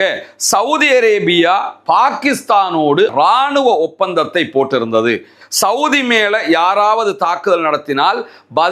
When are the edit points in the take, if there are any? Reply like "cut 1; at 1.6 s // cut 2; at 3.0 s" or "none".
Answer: cut 1; at 3.1 s // cut 2; at 5.4 s